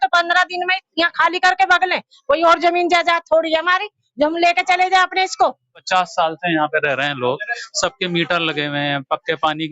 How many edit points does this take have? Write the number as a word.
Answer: one